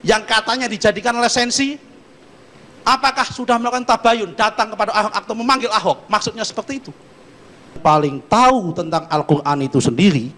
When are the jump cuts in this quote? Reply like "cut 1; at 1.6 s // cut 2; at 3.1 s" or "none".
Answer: cut 1; at 7.8 s